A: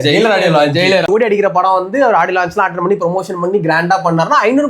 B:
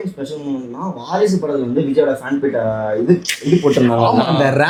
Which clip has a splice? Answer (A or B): A